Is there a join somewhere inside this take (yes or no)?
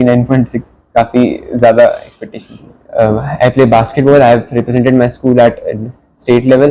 yes